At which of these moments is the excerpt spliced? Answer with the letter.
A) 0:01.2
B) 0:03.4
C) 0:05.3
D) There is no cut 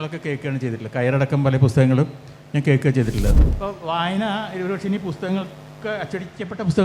B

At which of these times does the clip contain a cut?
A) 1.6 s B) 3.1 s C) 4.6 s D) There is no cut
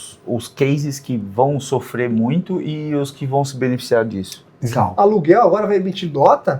C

